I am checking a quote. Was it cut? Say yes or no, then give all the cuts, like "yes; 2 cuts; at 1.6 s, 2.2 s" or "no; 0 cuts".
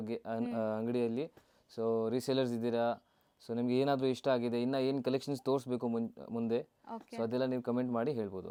no; 0 cuts